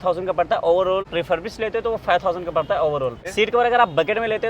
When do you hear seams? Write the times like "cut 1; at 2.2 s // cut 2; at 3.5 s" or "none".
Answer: cut 1; at 1.1 s // cut 2; at 3.2 s